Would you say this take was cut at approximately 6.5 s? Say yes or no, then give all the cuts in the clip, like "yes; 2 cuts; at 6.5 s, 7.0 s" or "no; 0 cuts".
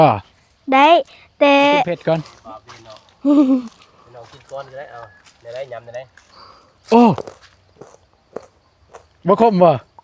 no; 1 cut; at 2.0 s